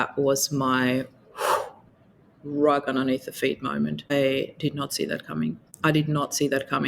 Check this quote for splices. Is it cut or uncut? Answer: cut